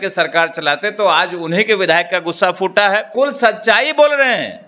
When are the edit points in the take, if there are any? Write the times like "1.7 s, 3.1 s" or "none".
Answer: 3.1 s